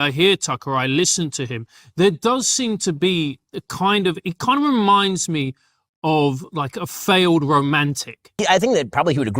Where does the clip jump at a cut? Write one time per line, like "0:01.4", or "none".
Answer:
0:08.3